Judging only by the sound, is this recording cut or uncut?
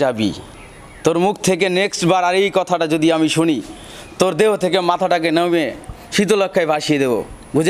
uncut